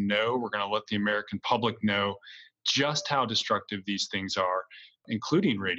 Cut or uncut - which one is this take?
uncut